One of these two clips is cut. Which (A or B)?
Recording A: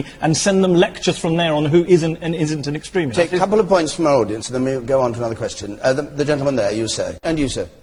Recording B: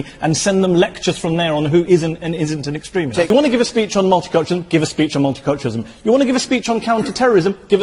B